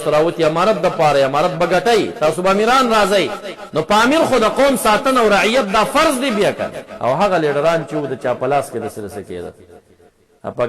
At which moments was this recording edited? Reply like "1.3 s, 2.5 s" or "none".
6.7 s